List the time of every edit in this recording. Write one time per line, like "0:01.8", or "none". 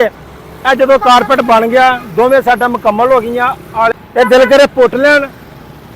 0:04.0

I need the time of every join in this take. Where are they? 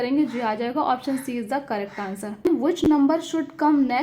0:02.5

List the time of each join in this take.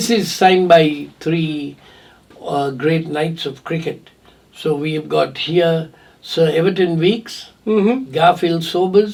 none

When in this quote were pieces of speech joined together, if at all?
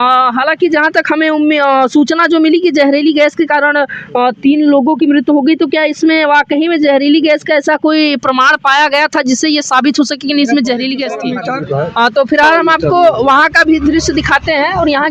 0:11.3

